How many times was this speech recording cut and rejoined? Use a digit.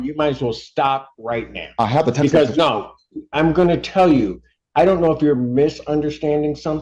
0